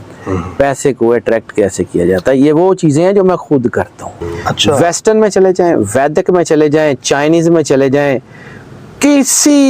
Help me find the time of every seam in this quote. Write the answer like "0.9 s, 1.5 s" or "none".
4.8 s